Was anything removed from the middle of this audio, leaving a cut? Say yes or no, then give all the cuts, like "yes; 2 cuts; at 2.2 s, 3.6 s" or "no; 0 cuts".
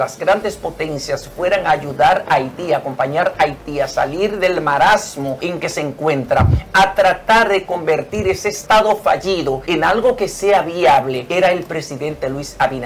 yes; 4 cuts; at 5.4 s, 8.5 s, 9.6 s, 11.2 s